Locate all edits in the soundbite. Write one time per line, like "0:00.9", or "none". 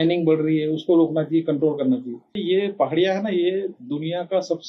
0:02.4